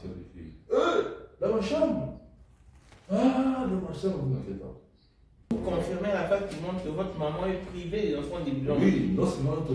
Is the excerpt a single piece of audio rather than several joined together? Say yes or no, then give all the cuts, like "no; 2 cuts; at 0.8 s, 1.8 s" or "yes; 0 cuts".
no; 1 cut; at 5.5 s